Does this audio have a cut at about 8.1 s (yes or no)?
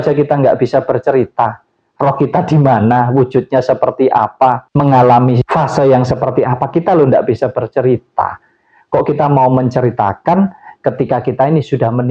no